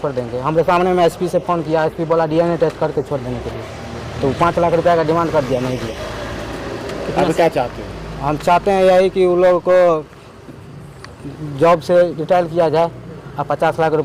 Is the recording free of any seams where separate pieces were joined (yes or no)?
yes